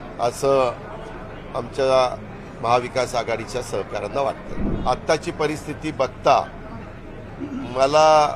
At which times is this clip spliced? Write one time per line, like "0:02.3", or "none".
0:04.7